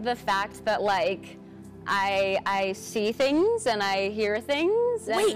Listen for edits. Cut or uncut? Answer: uncut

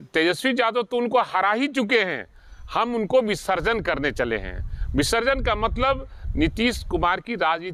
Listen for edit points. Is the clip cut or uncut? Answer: uncut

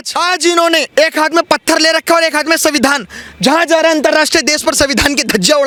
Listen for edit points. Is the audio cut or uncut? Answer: uncut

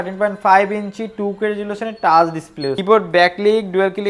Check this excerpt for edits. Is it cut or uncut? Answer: cut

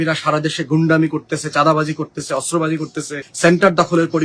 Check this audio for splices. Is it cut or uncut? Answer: cut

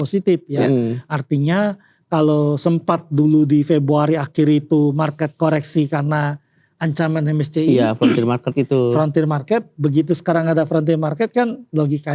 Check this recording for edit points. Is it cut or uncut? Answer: uncut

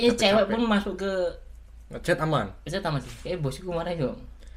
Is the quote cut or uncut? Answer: uncut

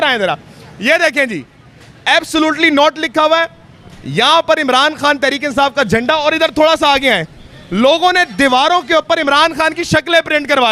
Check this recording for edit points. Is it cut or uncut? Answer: uncut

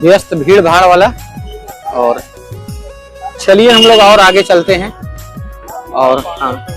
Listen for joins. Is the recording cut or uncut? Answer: uncut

